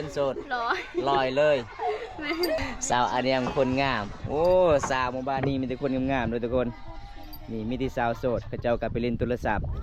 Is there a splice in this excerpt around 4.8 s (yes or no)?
no